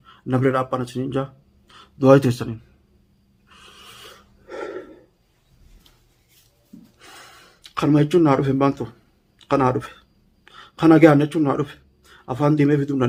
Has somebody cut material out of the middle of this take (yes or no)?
no